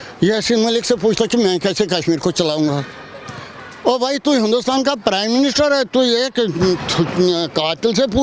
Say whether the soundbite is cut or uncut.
uncut